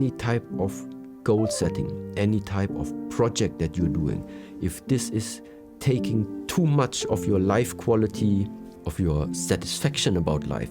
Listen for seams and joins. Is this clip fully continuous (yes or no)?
no